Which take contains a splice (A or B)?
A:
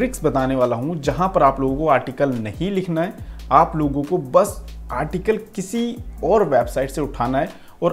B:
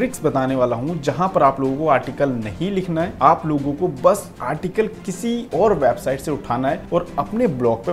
B